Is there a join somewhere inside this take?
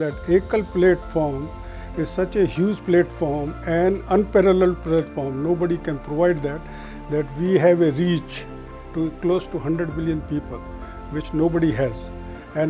no; 0 cuts

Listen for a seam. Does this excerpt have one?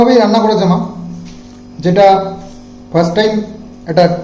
no; 0 cuts

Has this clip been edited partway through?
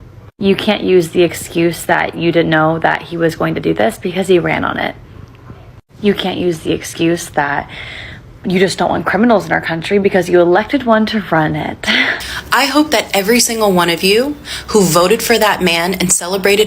yes; 1 cut; at 12.3 s

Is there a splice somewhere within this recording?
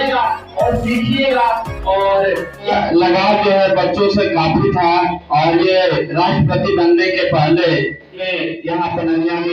yes; 2 cuts; at 2.7 s, 8.2 s

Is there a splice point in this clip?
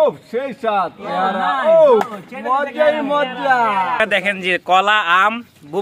yes; 1 cut; at 4.0 s

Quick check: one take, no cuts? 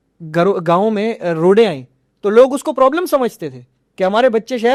yes; 0 cuts

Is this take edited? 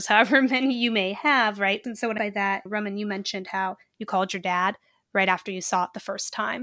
no; 0 cuts

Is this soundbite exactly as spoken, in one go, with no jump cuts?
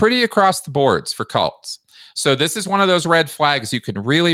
yes; 0 cuts

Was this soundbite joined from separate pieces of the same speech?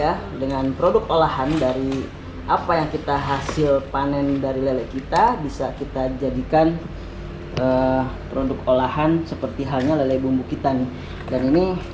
no; 0 cuts

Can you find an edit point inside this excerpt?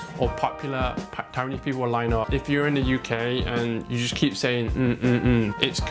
yes; 1 cut; at 2.3 s

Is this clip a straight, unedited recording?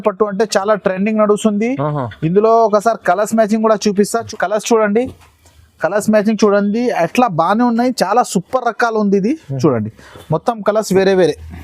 no; 1 cut; at 4.2 s

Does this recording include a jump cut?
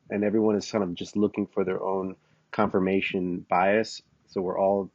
no; 0 cuts

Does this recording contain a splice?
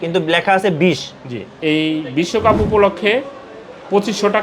yes; 1 cut; at 1.5 s

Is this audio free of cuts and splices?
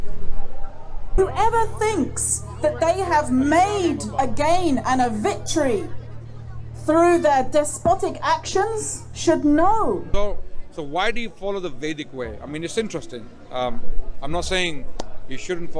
no; 2 cuts; at 1.2 s, 10.1 s

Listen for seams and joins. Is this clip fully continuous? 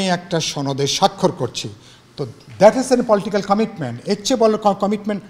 yes; 0 cuts

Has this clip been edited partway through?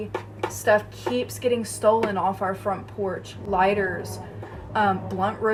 no; 0 cuts

